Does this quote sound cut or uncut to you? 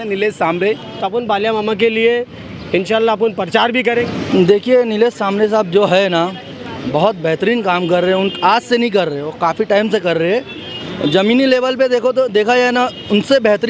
cut